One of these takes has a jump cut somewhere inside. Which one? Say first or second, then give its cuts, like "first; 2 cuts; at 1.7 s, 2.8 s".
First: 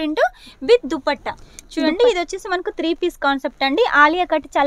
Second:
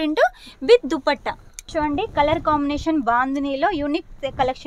second; 1 cut; at 1.6 s